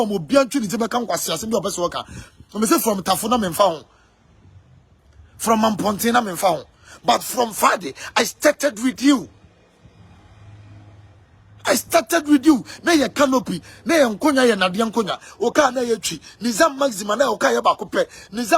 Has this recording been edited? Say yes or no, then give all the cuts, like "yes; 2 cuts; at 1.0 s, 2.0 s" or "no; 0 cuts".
no; 0 cuts